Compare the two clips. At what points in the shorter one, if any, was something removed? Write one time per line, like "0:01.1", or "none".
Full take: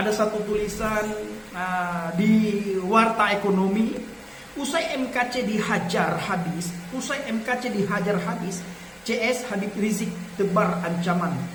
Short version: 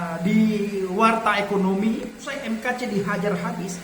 0:02.3